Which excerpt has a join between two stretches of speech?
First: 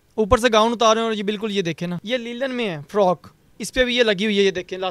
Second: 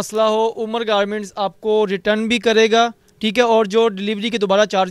first; 1 cut; at 2.0 s

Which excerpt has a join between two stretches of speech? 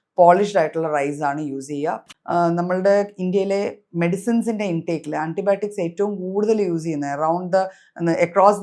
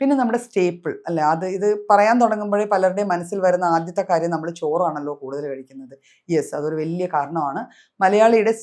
first; 1 cut; at 2.0 s

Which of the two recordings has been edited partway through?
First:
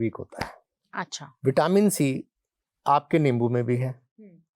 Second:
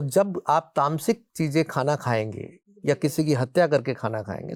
first; 1 cut; at 1.2 s

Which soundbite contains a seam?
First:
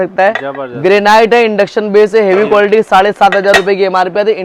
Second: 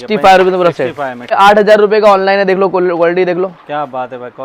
second; 1 cut; at 1.2 s

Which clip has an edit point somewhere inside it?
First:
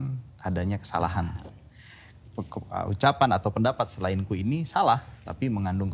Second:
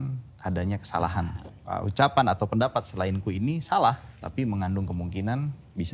second; 1 cut; at 1.6 s

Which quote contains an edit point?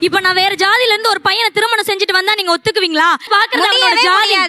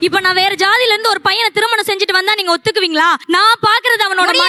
first; 1 cut; at 3.3 s

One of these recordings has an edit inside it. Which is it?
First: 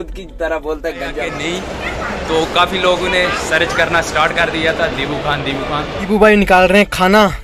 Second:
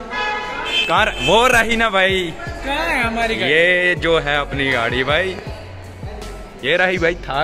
first; 2 cuts; at 1.3 s, 6.1 s

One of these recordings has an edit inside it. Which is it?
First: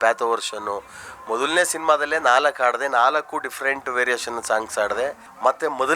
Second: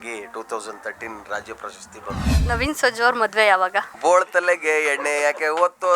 second; 2 cuts; at 2.4 s, 3.9 s

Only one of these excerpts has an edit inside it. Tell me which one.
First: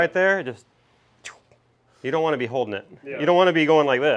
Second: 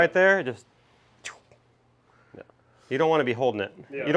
first; 1 cut; at 1.8 s

